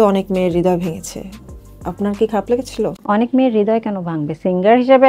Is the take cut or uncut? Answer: uncut